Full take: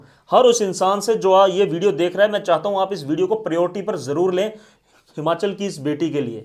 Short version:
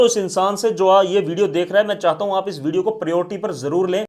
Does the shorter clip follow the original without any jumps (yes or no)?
yes